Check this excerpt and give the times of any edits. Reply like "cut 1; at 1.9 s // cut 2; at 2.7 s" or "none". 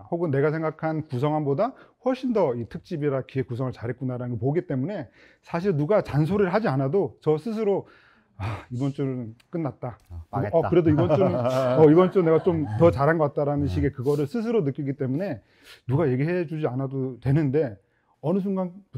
none